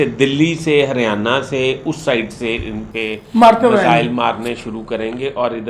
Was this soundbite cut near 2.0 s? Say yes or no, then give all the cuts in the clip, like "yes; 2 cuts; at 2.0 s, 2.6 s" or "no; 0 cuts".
no; 0 cuts